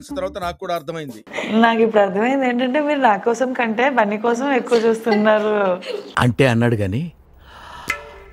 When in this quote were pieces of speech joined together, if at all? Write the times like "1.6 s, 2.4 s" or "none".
1.2 s